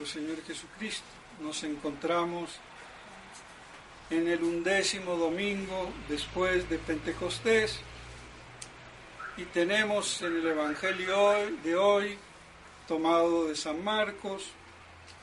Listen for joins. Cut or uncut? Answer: cut